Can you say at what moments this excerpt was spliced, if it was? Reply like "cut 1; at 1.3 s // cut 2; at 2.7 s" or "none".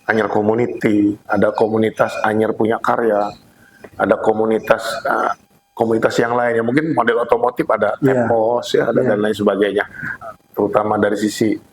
cut 1; at 10.2 s